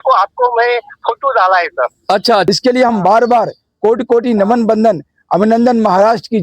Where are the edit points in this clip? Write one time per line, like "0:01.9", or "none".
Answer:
0:02.4

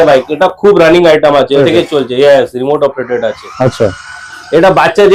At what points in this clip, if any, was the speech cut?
0:01.6

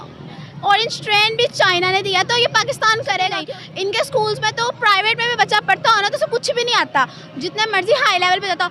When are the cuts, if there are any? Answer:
0:03.4

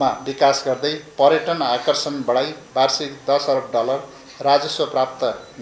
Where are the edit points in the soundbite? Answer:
none

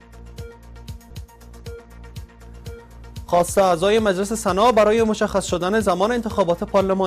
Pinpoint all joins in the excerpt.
0:01.1

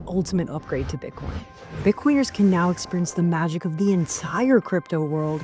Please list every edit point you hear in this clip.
none

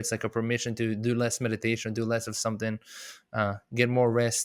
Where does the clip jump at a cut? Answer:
none

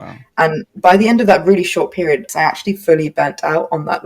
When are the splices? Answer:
0:02.3

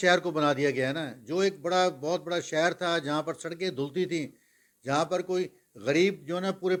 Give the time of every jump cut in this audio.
none

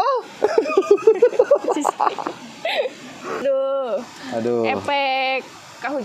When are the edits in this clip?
0:03.4

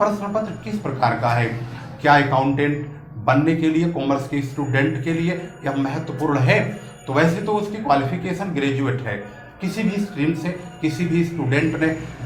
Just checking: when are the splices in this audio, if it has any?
none

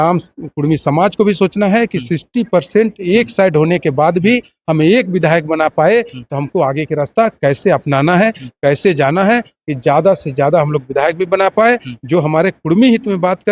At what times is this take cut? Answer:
none

